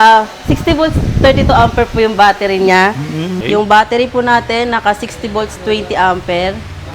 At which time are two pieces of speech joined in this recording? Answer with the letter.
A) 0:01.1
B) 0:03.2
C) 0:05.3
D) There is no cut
B